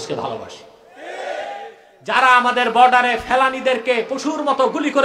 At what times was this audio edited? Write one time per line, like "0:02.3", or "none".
0:01.9